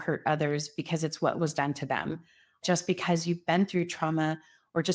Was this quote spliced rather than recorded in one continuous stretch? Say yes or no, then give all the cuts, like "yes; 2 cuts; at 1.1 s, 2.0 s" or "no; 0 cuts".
yes; 1 cut; at 2.6 s